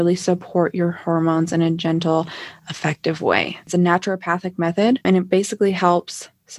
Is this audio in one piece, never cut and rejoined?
no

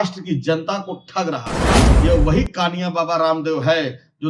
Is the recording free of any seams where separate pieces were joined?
no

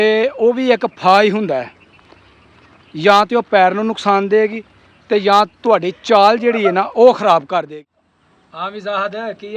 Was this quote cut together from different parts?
yes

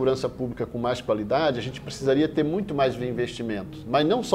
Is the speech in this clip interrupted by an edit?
no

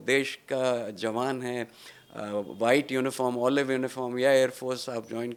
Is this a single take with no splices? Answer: yes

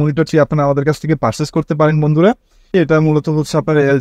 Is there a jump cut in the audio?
yes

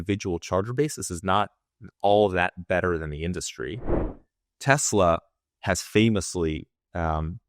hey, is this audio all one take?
no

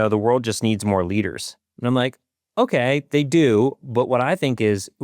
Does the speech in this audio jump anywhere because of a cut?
no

